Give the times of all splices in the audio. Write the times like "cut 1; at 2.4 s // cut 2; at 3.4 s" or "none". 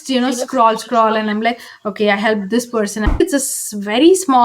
cut 1; at 3.2 s

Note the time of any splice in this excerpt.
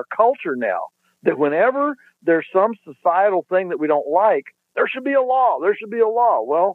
none

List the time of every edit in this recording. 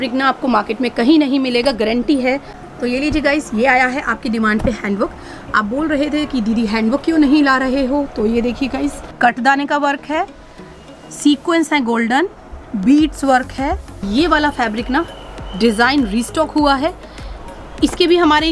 cut 1; at 2.5 s // cut 2; at 9.1 s // cut 3; at 13.9 s

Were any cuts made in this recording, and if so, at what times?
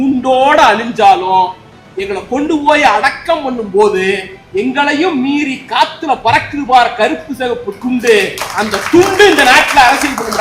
none

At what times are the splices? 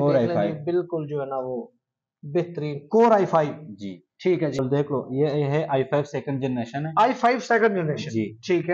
cut 1; at 4.5 s

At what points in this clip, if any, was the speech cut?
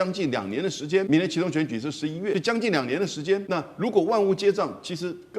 cut 1; at 1.1 s // cut 2; at 2.3 s // cut 3; at 3.4 s

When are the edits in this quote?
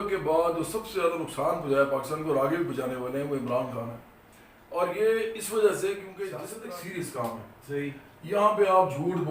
cut 1; at 6.5 s

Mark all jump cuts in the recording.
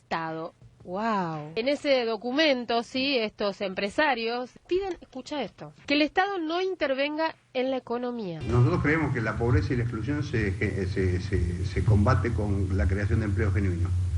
cut 1; at 1.5 s // cut 2; at 8.4 s

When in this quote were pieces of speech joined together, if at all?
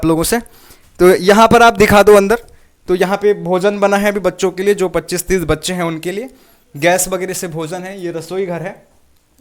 none

